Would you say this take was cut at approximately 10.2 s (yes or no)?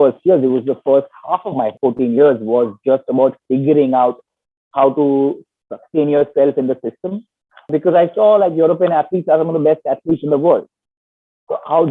no